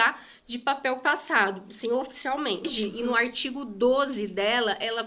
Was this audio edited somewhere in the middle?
yes; 1 cut; at 2.7 s

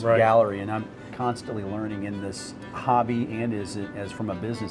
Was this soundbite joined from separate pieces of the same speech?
yes; 2 cuts; at 1.0 s, 2.8 s

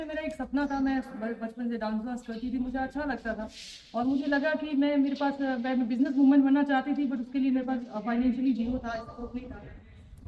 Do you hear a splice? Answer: no; 0 cuts

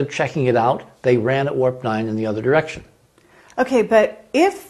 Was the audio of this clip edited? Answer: no; 0 cuts

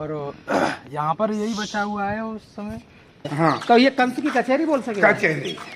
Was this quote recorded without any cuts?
no; 1 cut; at 3.3 s

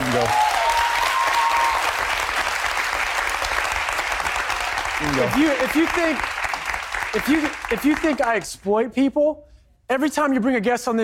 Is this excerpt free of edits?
no; 1 cut; at 2.8 s

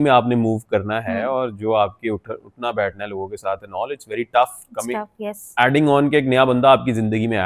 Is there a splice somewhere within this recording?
no; 0 cuts

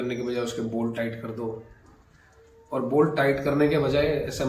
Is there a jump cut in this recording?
no; 0 cuts

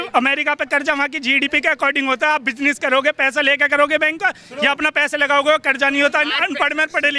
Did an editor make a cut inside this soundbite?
no; 0 cuts

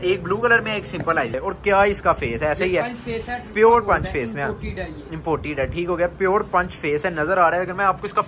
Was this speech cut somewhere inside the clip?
yes; 1 cut; at 1.3 s

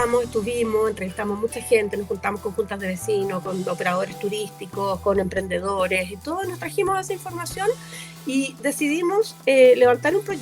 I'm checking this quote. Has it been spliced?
no; 0 cuts

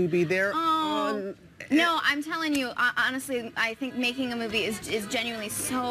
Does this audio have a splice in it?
yes; 1 cut; at 1.2 s

